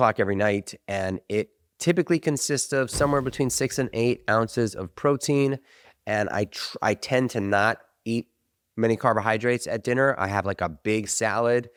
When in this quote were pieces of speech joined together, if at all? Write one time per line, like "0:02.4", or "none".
none